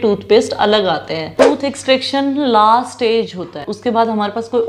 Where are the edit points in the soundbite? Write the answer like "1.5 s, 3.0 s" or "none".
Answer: 1.3 s, 3.7 s